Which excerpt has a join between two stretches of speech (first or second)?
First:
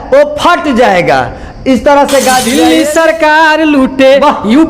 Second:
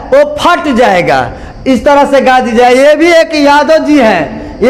first